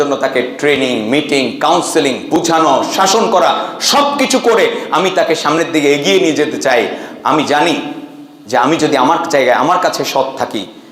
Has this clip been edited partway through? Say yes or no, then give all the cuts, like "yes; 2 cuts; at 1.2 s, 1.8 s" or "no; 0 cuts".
no; 0 cuts